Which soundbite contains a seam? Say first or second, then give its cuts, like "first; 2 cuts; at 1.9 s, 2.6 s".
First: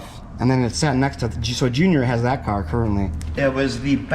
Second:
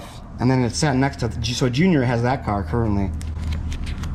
first; 1 cut; at 3.2 s